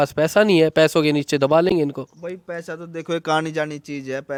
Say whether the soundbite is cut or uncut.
uncut